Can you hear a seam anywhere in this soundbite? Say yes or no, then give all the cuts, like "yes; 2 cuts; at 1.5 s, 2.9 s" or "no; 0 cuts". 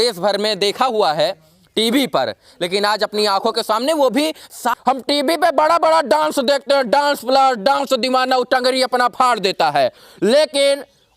yes; 1 cut; at 4.7 s